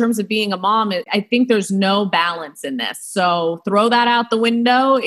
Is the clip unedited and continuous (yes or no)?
no